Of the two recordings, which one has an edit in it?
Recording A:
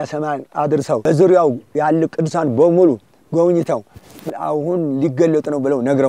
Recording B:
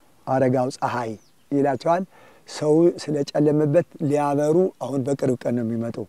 A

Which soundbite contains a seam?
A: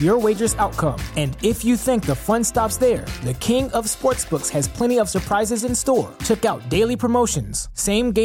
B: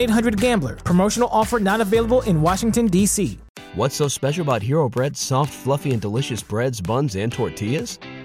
B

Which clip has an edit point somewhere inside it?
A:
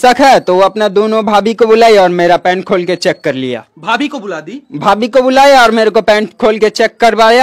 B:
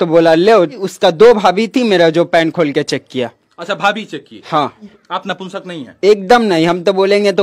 B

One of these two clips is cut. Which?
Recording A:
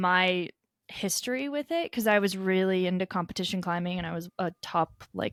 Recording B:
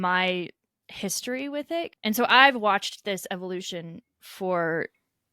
B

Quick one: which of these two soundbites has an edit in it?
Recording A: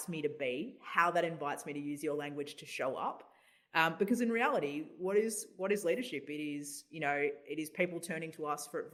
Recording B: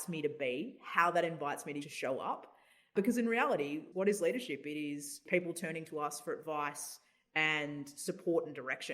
B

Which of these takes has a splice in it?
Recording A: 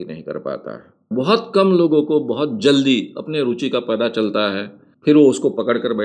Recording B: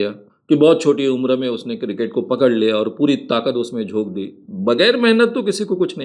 A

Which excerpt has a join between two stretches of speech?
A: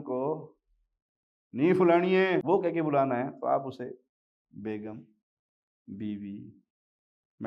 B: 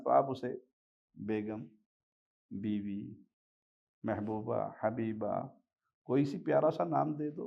A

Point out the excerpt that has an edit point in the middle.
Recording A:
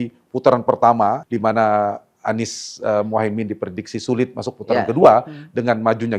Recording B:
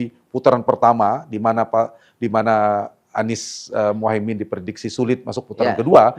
A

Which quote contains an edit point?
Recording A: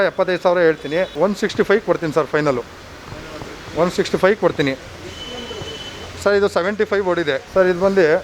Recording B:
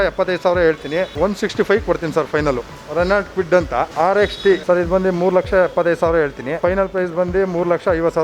B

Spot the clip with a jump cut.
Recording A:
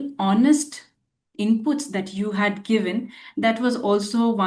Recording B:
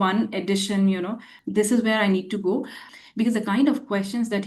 B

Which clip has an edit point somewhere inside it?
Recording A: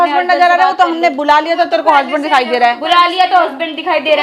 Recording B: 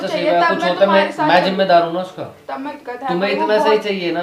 B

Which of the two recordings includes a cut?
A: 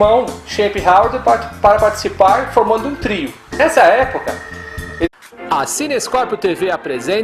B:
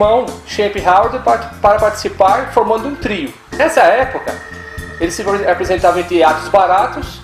B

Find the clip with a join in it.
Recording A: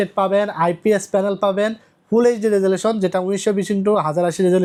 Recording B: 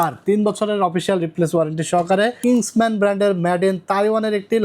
B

